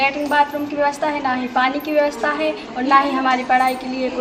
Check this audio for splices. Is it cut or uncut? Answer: uncut